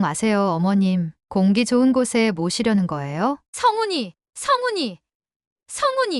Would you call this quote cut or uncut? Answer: cut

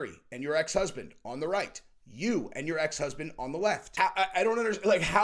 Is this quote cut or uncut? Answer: cut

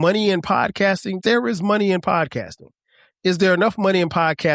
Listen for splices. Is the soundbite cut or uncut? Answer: cut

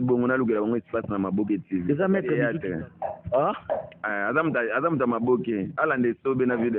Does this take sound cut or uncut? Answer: cut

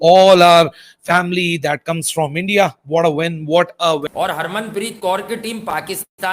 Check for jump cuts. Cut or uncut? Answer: cut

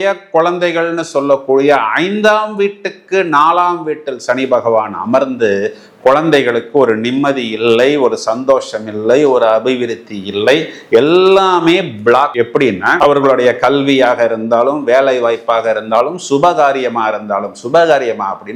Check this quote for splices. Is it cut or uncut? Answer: uncut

